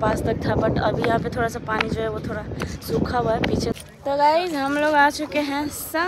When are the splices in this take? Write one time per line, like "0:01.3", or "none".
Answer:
0:03.8